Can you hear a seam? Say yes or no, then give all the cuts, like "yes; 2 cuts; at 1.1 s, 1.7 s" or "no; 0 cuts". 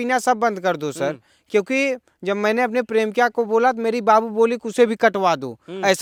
no; 0 cuts